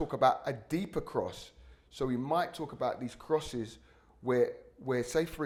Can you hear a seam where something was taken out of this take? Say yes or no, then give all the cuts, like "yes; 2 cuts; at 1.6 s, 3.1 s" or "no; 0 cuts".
no; 0 cuts